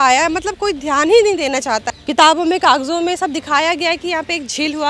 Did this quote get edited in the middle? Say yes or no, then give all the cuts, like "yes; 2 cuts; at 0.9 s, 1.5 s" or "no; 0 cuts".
yes; 1 cut; at 1.9 s